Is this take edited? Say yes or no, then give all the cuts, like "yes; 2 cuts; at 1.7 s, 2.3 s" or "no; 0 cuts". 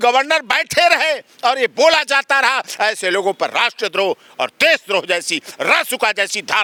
no; 0 cuts